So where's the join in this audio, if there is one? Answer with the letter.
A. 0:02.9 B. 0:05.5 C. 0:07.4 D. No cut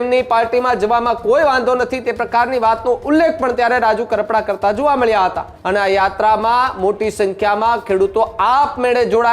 B